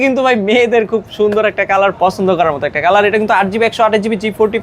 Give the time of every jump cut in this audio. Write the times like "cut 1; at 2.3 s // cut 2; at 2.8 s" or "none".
none